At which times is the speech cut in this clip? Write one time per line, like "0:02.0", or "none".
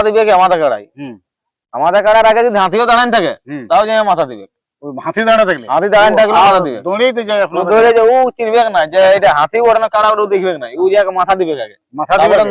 none